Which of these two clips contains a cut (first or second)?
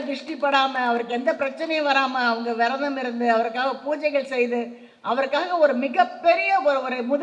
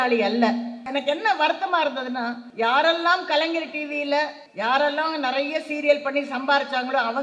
second